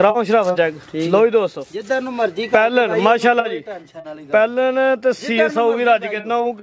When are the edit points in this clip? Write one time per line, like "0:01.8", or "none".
none